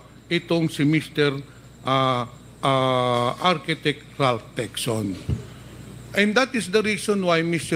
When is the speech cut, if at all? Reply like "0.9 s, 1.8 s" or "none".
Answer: none